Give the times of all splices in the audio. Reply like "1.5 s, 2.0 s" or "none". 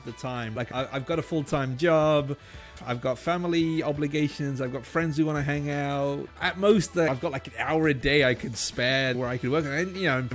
9.2 s